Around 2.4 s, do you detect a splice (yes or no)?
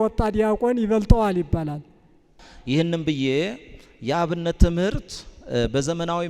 yes